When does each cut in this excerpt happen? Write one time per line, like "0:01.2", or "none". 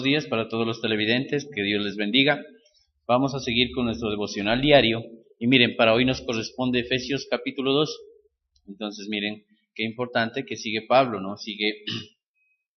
none